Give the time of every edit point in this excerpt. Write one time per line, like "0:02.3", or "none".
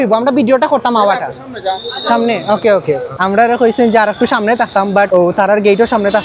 0:03.1
0:05.1